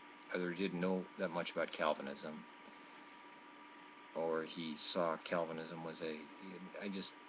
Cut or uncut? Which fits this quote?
uncut